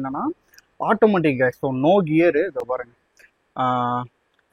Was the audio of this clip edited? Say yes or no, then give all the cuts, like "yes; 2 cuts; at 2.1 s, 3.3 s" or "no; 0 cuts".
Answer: no; 0 cuts